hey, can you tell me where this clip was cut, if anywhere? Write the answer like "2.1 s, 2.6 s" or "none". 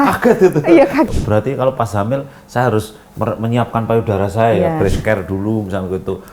1.1 s